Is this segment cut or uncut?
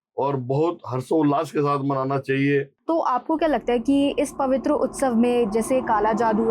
cut